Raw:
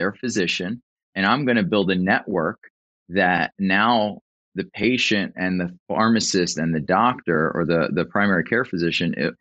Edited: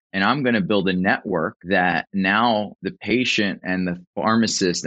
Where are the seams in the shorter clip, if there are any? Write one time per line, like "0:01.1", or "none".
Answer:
0:01.6
0:02.8

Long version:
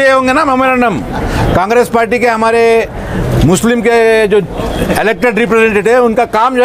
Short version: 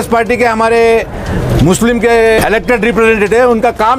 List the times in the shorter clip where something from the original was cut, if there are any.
0:02.4

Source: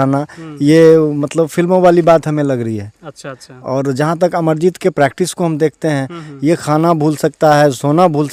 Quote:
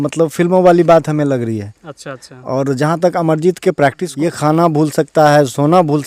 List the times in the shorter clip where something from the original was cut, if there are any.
0:04.1

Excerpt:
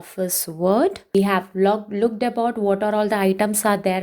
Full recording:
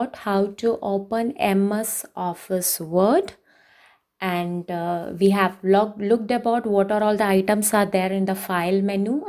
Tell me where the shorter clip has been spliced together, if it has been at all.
0:01.0

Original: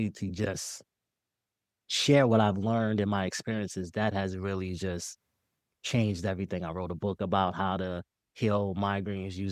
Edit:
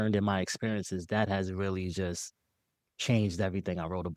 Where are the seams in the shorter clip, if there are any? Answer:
none

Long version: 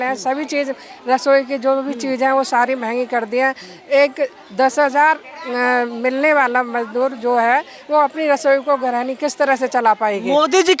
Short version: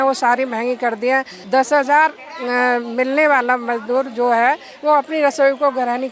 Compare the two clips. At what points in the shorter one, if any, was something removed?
0:01.4

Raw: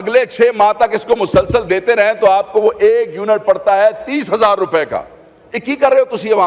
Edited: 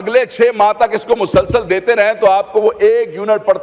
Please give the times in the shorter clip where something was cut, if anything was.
none

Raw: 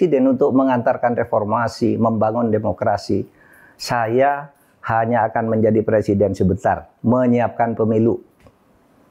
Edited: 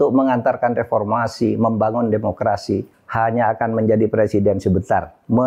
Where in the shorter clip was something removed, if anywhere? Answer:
0:03.0

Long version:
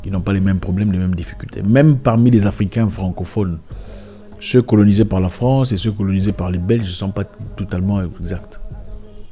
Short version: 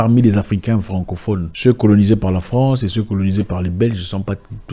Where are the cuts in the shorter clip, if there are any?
0:01.5

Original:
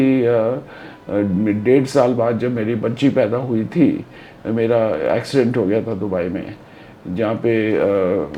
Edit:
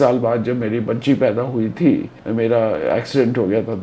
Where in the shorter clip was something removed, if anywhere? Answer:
0:02.2

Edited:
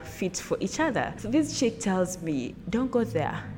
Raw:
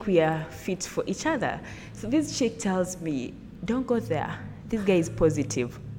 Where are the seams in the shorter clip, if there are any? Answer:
0:01.2
0:02.6

